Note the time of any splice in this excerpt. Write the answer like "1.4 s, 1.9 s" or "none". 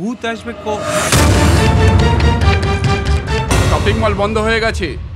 3.5 s